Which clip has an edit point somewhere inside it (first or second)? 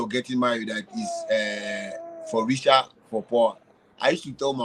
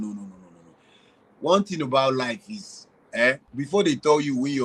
second